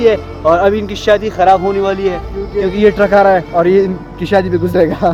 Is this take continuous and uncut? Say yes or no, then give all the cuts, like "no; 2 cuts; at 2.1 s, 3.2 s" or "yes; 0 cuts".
yes; 0 cuts